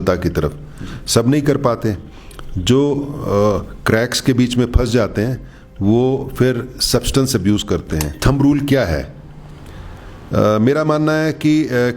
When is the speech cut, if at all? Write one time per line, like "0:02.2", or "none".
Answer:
0:08.1

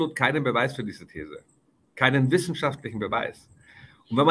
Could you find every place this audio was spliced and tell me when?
none

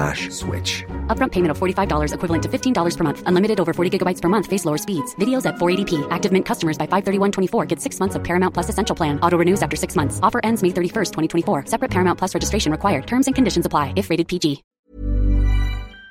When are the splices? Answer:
0:14.7

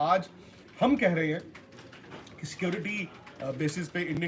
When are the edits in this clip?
none

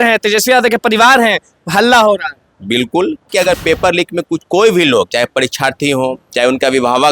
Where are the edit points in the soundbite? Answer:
0:03.3

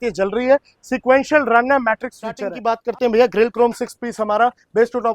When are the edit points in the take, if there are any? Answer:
0:02.5

